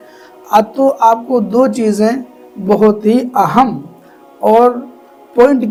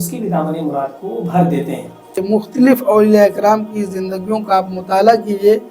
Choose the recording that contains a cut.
second; 1 cut; at 2.2 s

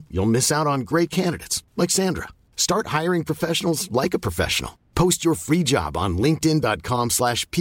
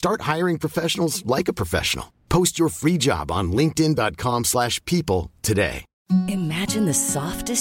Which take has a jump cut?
second; 1 cut; at 5.9 s

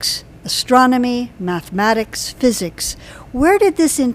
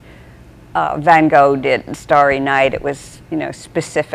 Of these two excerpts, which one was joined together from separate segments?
second; 1 cut; at 1.3 s

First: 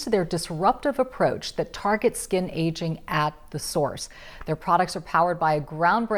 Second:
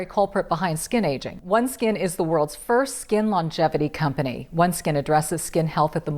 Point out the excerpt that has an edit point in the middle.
second; 1 cut; at 1.3 s

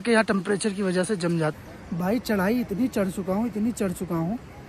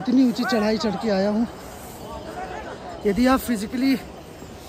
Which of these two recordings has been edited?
first; 1 cut; at 1.7 s

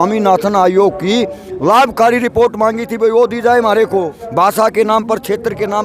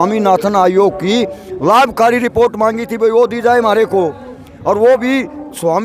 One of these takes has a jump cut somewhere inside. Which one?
first; 1 cut; at 4.2 s

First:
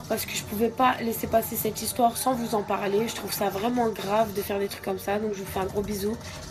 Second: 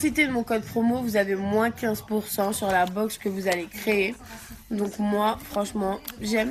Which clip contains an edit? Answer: first; 1 cut; at 3.5 s

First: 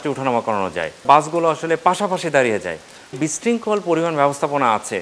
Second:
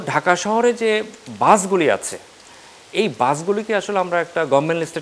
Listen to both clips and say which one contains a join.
first; 2 cuts; at 1.0 s, 3.2 s

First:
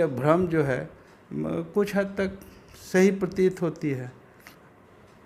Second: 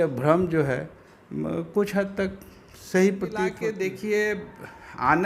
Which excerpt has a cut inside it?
second; 1 cut; at 3.6 s

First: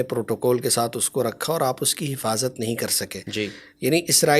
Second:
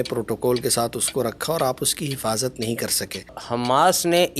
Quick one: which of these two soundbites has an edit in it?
second; 1 cut; at 3.3 s

